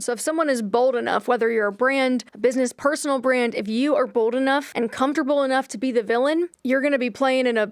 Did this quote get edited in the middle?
yes; 3 cuts; at 2.3 s, 4.7 s, 6.6 s

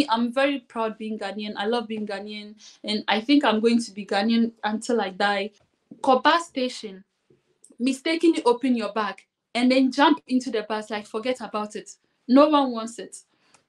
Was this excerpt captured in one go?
no; 1 cut; at 5.6 s

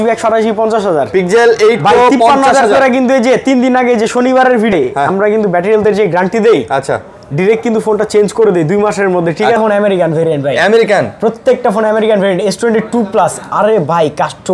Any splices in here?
yes; 2 cuts; at 4.7 s, 9.6 s

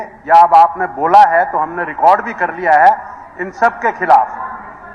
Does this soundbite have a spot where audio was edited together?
no; 0 cuts

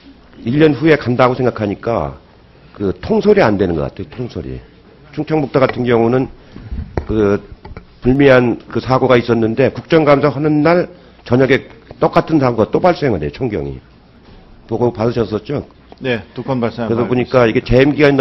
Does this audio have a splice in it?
yes; 1 cut; at 7.9 s

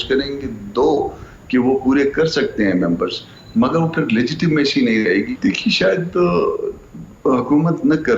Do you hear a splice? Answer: yes; 1 cut; at 5.3 s

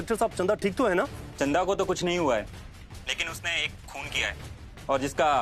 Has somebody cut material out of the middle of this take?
yes; 1 cut; at 1.2 s

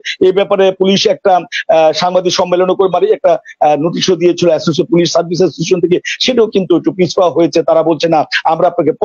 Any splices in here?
no; 0 cuts

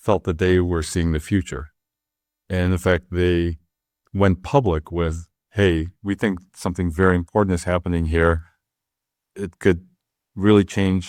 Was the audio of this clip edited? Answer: no; 0 cuts

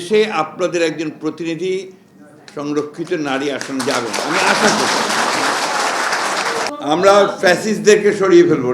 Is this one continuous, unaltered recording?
no; 1 cut; at 6.7 s

